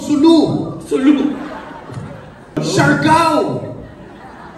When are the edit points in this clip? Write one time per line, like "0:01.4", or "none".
0:02.6